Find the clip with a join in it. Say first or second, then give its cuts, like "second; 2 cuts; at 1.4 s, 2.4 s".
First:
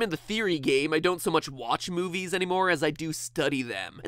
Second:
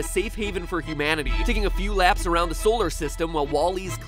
second; 1 cut; at 2.8 s